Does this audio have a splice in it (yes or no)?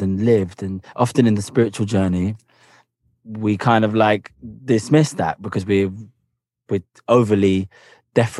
no